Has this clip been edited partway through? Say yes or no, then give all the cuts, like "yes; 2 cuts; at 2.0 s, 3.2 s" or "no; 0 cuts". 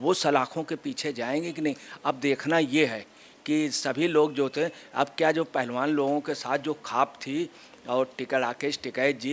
no; 0 cuts